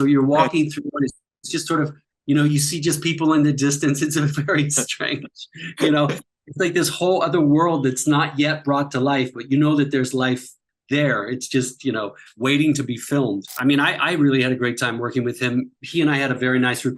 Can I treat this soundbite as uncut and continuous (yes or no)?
no